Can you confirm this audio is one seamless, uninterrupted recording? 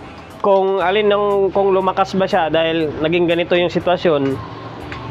yes; 0 cuts

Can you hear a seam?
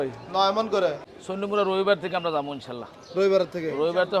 yes; 1 cut; at 1.1 s

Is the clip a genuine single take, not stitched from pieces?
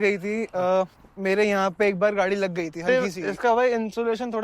no; 1 cut; at 2.8 s

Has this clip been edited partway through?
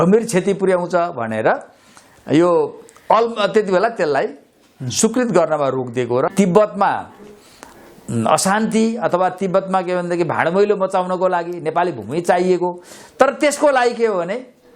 yes; 1 cut; at 6.3 s

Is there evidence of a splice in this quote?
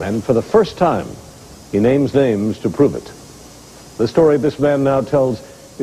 yes; 1 cut; at 1.9 s

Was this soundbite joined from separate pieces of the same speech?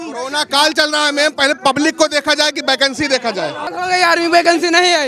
yes; 1 cut; at 3.7 s

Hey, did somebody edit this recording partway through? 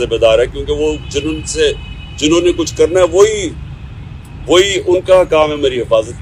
no; 0 cuts

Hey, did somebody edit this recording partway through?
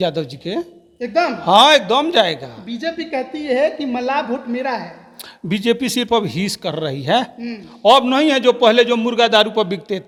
no; 0 cuts

